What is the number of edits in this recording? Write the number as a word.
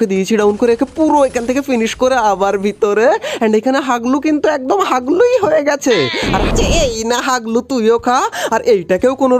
one